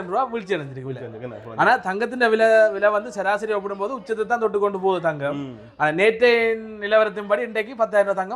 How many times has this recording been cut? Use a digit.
0